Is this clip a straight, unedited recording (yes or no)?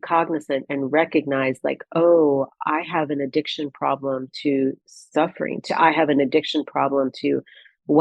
yes